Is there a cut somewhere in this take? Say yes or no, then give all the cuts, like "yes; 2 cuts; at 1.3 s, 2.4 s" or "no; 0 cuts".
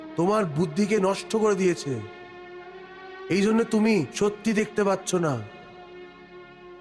no; 0 cuts